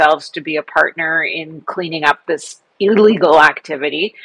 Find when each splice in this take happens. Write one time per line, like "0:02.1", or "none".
none

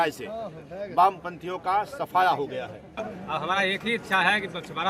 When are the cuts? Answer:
0:03.1

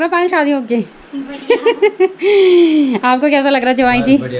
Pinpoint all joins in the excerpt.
none

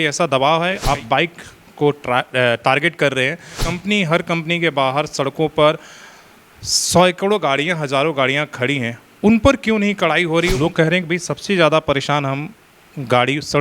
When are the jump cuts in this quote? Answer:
0:00.8
0:03.6
0:10.5

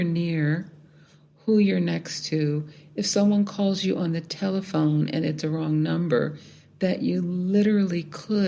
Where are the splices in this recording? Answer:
none

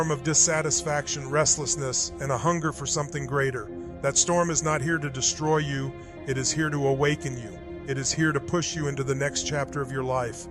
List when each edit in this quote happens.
0:05.2

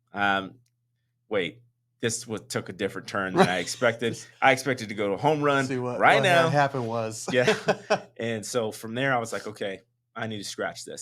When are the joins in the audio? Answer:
none

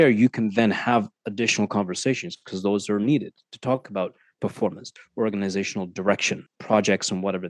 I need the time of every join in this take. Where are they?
0:04.9
0:06.5

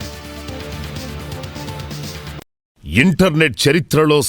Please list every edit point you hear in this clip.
0:02.7

